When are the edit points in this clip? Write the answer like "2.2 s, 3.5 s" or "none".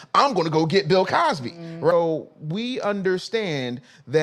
1.9 s